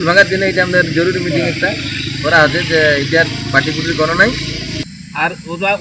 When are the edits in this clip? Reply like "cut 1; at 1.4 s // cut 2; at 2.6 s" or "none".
cut 1; at 4.8 s